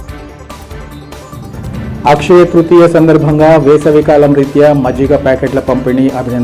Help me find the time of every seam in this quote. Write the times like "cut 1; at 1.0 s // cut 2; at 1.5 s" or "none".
cut 1; at 1.4 s